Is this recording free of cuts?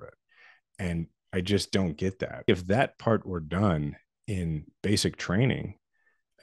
no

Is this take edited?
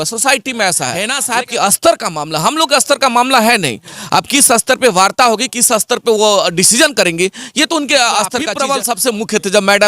yes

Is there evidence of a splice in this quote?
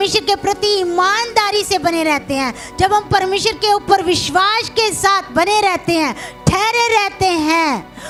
no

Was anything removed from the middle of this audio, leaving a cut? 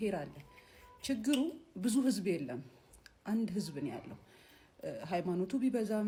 no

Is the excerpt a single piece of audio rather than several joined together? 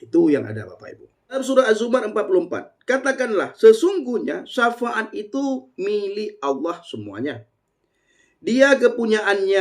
no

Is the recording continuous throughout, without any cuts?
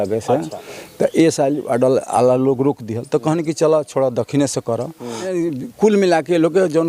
no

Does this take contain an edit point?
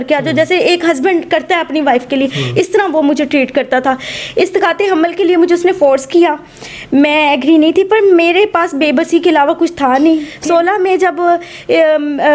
yes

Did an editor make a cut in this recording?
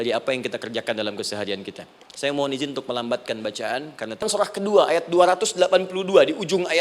yes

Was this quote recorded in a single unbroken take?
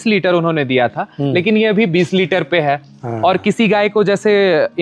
yes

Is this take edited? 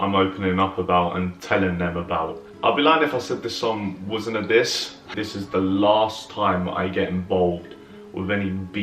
yes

